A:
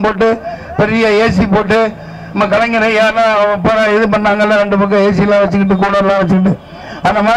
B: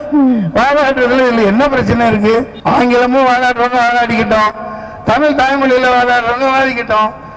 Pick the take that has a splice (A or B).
B